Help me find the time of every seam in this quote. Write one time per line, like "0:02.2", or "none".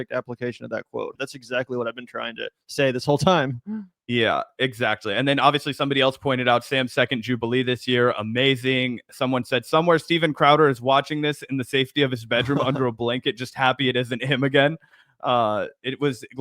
0:01.1